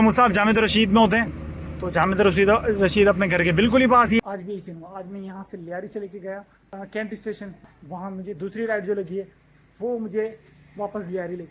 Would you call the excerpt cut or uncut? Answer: cut